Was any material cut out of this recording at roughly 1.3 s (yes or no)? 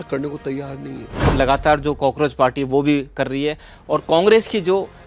yes